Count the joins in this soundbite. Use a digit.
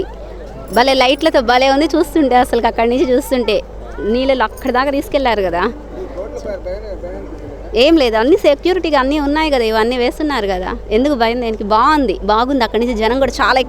0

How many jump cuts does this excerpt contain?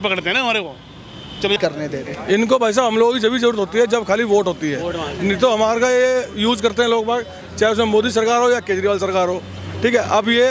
1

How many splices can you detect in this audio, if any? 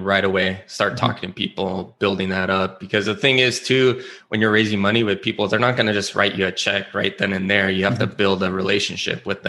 0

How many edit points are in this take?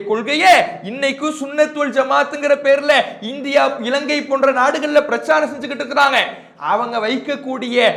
0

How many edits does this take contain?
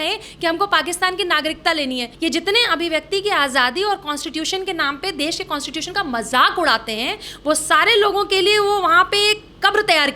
1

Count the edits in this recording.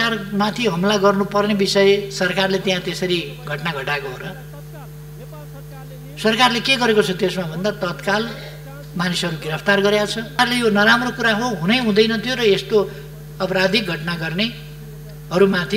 1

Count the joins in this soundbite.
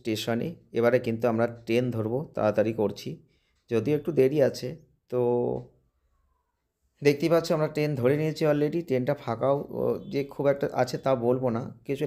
0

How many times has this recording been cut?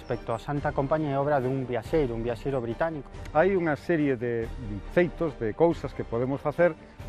1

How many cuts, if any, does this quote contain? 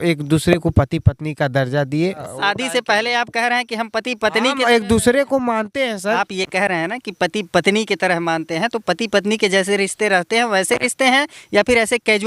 2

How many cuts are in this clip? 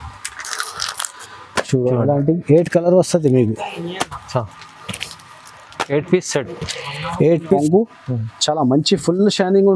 1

